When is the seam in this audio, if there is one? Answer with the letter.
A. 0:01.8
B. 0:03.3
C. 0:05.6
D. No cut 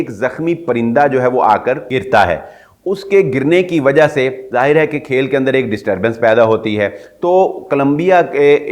A